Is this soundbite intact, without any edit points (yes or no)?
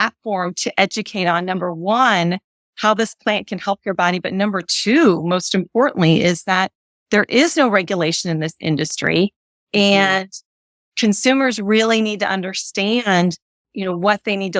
yes